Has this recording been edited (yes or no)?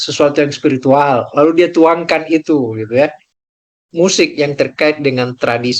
yes